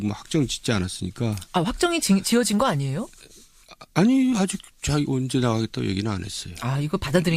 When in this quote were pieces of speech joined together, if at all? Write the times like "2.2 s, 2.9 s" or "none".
none